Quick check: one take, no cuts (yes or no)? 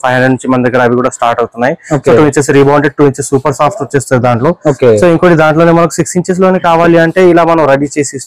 yes